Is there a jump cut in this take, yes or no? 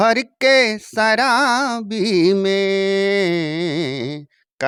no